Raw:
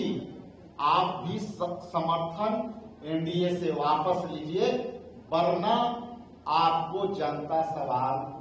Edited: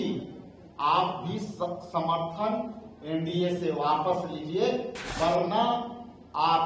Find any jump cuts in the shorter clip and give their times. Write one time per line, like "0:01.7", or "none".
0:05.0